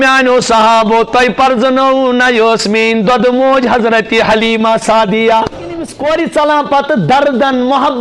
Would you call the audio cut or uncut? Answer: cut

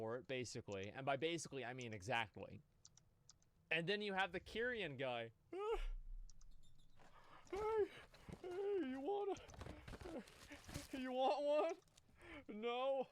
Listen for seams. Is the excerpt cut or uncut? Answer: uncut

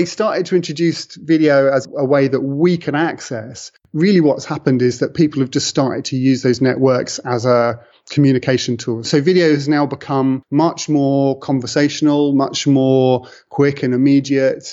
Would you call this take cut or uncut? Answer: uncut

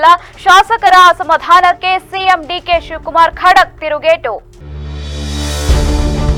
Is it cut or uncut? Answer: uncut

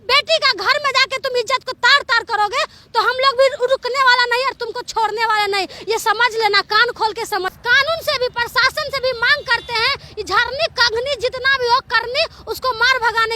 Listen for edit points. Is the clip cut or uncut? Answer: cut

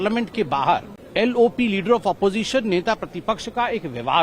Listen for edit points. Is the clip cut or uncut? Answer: cut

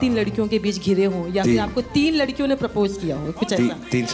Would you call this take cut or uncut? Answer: uncut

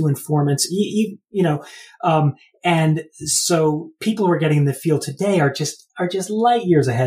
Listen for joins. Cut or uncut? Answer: uncut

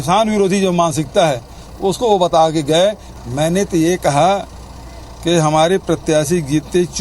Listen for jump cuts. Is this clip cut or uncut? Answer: cut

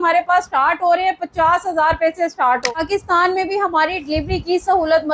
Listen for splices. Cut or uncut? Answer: cut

